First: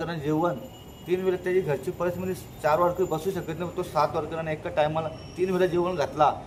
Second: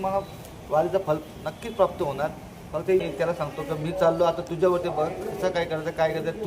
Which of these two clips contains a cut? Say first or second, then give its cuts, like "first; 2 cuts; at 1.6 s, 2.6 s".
second; 1 cut; at 3.0 s